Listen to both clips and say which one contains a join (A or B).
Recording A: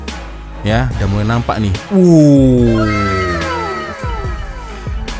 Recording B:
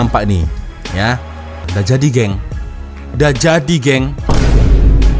B